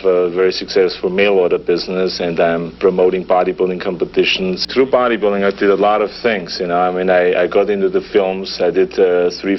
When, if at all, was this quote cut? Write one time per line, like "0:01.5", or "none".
none